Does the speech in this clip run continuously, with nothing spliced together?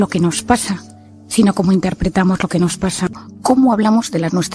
no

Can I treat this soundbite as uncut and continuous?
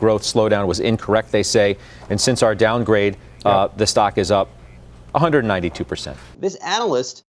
no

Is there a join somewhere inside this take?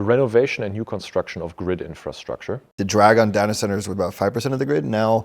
yes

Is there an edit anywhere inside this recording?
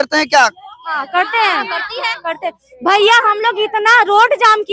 no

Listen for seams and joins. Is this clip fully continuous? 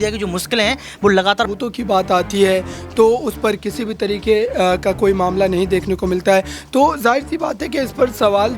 no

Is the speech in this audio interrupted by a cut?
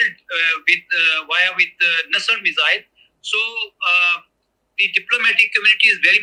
no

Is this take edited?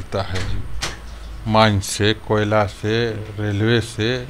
no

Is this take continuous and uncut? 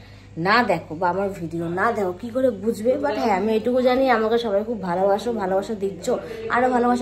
yes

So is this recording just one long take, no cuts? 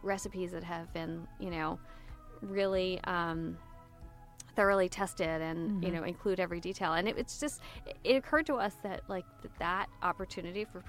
yes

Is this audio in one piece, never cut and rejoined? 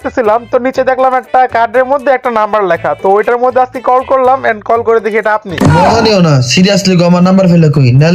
yes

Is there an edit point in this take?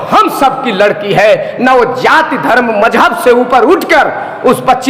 no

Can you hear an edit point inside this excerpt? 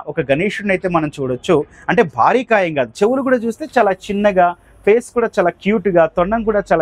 no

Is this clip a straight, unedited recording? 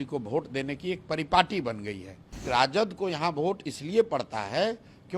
no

